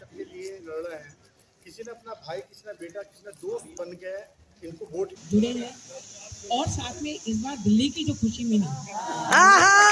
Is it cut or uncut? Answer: cut